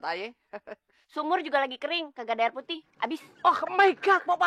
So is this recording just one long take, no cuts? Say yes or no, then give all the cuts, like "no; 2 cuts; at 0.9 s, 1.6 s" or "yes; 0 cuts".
yes; 0 cuts